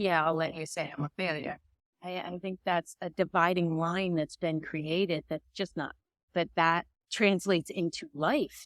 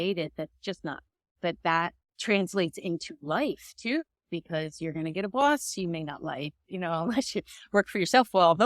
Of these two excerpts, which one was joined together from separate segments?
first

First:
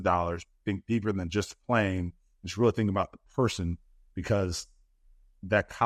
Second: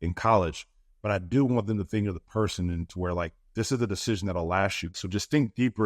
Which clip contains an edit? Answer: second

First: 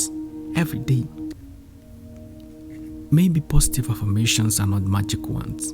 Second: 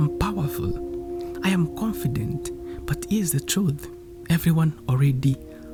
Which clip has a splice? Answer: first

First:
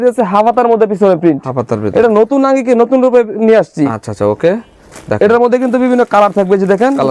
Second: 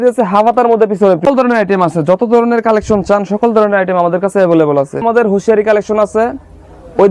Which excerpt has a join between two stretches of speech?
second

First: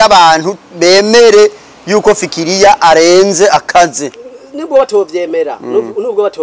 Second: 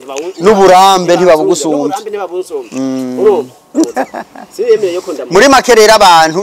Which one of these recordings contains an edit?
second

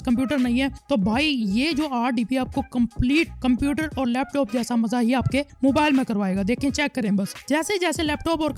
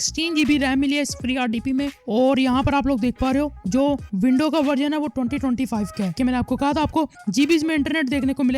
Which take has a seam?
second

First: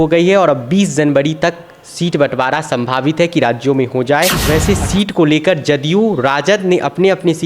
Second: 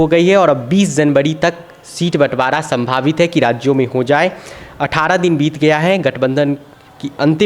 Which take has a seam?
first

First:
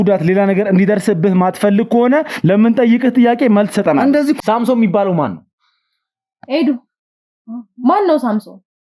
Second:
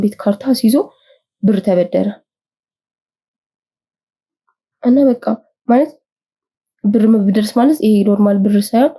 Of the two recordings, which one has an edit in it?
first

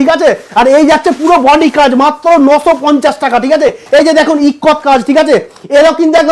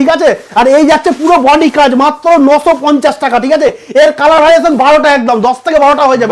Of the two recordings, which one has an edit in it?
first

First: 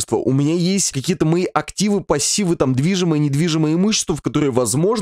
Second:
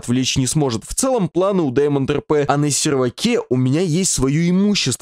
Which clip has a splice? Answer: second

